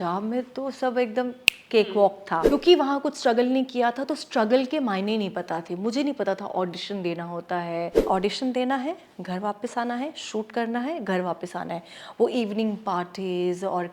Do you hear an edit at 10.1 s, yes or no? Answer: no